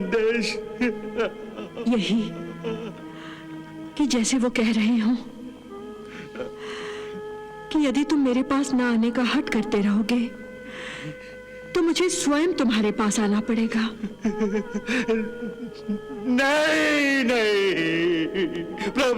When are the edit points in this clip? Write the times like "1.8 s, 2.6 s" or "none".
14.1 s